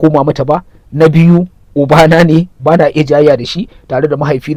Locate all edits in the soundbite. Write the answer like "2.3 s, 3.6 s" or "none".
none